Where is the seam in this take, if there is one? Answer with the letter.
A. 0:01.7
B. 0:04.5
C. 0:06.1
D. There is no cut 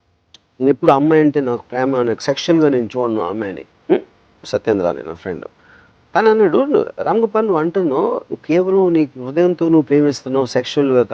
B